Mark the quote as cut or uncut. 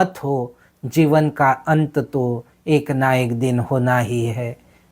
uncut